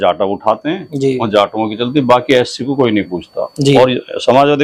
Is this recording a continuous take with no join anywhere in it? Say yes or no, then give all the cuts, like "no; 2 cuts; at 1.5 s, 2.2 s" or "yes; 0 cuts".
yes; 0 cuts